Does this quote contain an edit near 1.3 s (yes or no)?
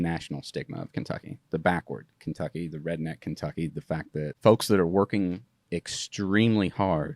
yes